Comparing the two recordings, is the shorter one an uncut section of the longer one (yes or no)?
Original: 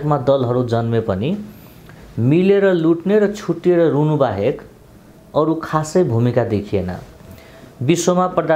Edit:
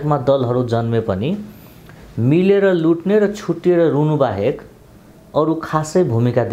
yes